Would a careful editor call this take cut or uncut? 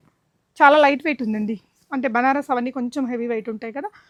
uncut